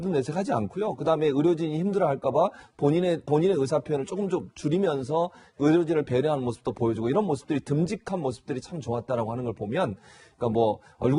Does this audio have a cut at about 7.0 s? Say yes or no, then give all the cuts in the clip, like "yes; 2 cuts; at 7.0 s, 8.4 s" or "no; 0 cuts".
yes; 1 cut; at 7.0 s